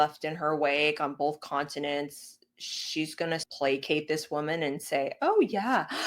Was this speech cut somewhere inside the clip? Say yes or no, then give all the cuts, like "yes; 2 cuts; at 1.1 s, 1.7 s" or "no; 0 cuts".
yes; 1 cut; at 3.4 s